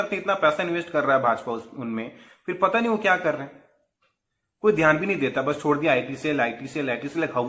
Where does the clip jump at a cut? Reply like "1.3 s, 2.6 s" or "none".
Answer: none